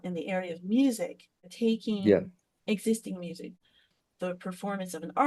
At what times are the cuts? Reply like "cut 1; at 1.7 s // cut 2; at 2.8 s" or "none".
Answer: cut 1; at 1.5 s // cut 2; at 3.6 s